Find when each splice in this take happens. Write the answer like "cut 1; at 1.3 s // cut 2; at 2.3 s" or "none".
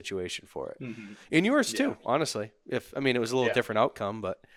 none